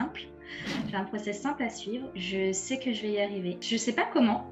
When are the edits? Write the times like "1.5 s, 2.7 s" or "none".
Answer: 2.1 s, 3.6 s